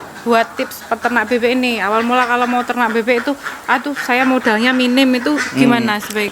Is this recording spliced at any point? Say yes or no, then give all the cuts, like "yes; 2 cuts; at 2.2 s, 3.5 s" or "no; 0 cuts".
no; 0 cuts